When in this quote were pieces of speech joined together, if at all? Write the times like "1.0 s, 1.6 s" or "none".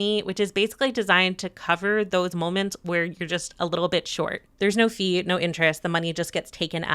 4.4 s